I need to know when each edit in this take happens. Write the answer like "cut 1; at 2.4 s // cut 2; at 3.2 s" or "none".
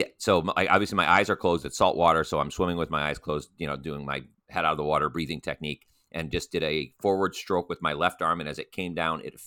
none